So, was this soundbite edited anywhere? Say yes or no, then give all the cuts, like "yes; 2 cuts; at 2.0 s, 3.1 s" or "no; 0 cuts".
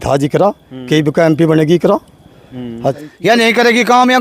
yes; 1 cut; at 3.0 s